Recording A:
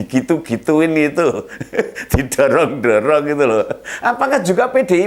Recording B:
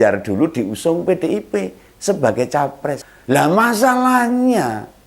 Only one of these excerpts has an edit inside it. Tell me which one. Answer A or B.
B